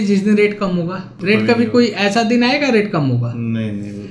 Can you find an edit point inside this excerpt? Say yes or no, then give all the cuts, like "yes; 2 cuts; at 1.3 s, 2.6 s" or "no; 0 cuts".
yes; 1 cut; at 1.1 s